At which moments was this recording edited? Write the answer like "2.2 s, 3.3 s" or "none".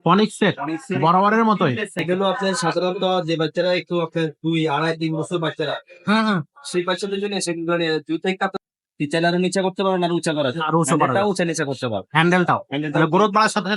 2.0 s, 8.6 s